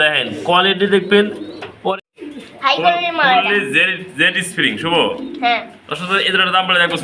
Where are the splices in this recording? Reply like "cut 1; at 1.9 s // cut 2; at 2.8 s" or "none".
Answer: cut 1; at 2.1 s